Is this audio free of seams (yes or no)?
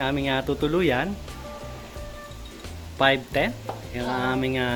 yes